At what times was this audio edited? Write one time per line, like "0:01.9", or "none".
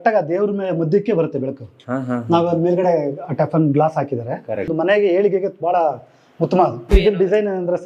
0:04.7
0:07.0